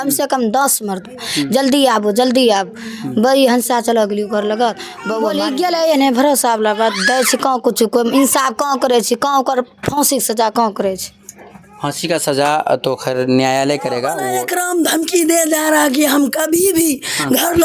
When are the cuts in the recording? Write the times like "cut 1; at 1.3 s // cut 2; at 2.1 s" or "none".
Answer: cut 1; at 5.3 s // cut 2; at 14.2 s

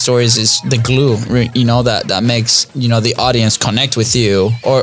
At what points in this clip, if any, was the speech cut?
none

